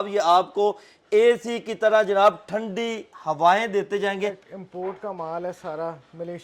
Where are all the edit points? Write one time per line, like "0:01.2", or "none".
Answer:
0:04.5